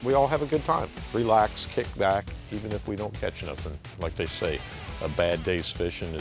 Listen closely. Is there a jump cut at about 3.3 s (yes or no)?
no